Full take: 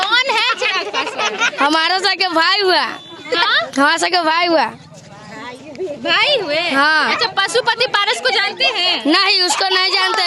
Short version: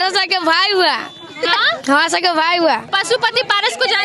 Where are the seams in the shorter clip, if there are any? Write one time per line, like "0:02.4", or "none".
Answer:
0:02.9